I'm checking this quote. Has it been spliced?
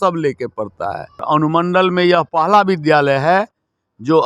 yes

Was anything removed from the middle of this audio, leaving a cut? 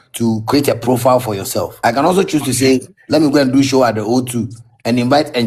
yes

